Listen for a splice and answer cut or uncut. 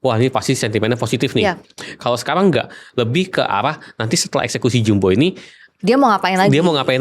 uncut